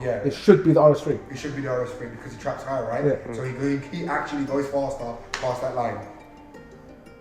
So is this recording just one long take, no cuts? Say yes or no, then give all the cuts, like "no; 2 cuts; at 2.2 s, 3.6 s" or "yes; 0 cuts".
yes; 0 cuts